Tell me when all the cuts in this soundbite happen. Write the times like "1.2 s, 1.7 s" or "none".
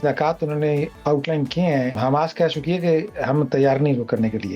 1.0 s, 2.0 s

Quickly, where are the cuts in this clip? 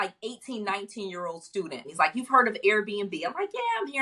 1.9 s

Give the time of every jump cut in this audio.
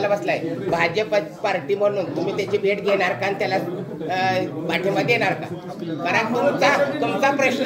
none

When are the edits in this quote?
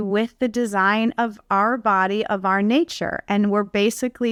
none

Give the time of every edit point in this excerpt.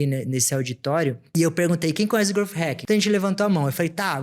1.2 s, 2.8 s

